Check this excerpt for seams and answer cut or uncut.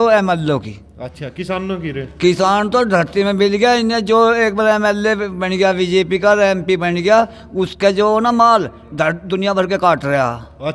uncut